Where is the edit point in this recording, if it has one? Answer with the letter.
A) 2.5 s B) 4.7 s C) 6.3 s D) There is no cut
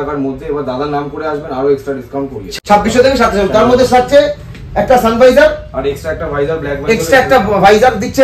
A